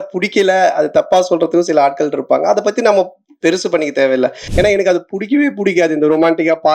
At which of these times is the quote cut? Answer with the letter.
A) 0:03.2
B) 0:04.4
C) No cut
B